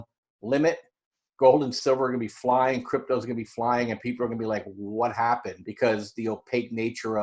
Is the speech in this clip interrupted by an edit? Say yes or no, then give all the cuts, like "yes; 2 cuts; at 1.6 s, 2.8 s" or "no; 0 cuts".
yes; 1 cut; at 5.6 s